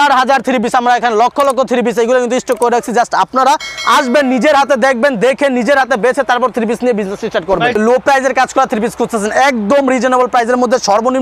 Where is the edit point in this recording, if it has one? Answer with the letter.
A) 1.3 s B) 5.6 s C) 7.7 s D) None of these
C